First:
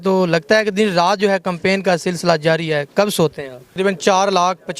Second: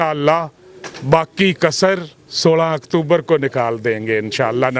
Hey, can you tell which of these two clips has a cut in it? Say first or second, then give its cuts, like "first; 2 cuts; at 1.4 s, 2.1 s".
first; 1 cut; at 3.7 s